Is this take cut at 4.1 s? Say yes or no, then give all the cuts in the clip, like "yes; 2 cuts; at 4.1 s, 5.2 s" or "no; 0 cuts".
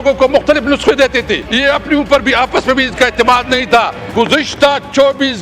yes; 2 cuts; at 1.4 s, 4.1 s